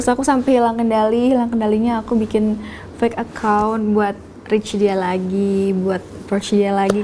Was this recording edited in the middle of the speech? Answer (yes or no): no